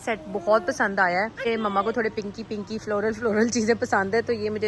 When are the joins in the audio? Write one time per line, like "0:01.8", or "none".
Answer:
0:01.5